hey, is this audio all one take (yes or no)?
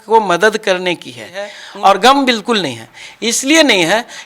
no